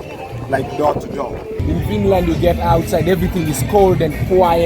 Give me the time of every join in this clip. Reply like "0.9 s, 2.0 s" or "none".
1.5 s